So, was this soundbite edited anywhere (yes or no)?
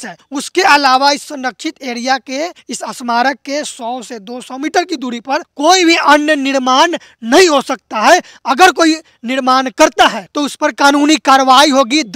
no